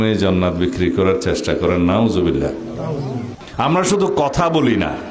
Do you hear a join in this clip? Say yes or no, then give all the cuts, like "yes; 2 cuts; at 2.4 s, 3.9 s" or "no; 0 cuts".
yes; 1 cut; at 3.2 s